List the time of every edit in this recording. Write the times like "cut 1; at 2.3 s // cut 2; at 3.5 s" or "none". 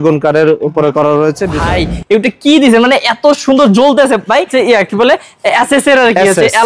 cut 1; at 1.5 s // cut 2; at 4.5 s